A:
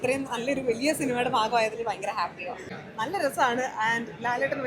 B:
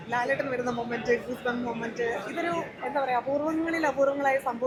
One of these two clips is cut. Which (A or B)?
A